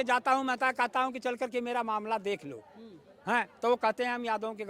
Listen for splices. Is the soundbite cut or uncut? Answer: uncut